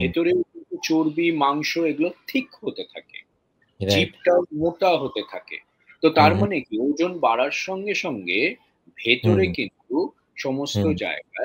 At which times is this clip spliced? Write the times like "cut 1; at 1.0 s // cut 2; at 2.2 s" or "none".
none

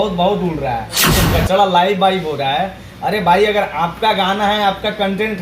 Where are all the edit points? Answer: cut 1; at 1.2 s

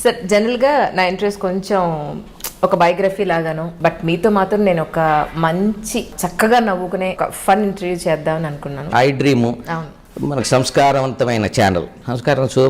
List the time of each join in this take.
cut 1; at 3.7 s // cut 2; at 6.2 s // cut 3; at 7.2 s // cut 4; at 8.9 s

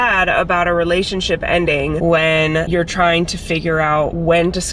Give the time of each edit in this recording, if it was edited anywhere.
none

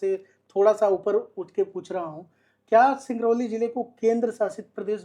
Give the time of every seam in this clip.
none

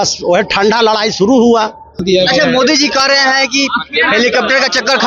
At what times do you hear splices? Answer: cut 1; at 2.0 s

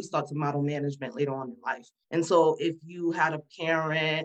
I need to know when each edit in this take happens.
cut 1; at 1.9 s

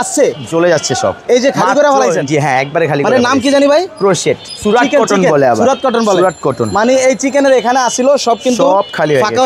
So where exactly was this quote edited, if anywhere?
none

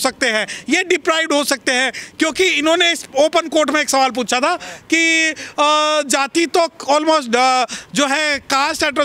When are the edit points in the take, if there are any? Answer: none

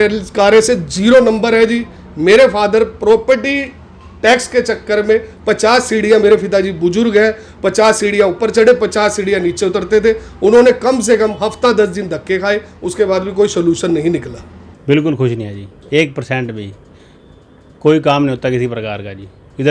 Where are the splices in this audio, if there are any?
none

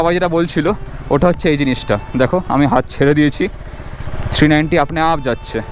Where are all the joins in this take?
none

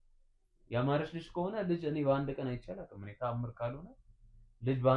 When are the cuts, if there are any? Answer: none

